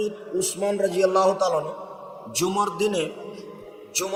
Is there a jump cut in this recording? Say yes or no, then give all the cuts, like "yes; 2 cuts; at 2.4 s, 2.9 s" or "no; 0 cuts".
no; 0 cuts